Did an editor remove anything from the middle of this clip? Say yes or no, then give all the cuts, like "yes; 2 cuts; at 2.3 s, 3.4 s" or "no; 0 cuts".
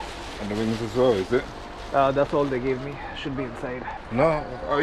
yes; 1 cut; at 3.9 s